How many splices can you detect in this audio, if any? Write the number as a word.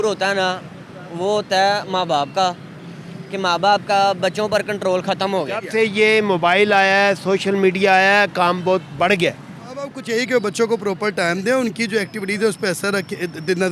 two